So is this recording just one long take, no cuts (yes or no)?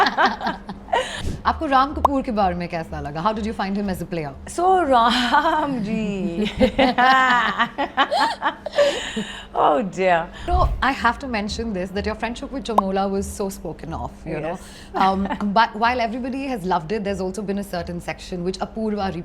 no